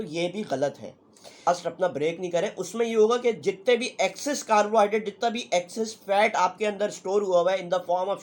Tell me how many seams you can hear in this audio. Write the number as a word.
one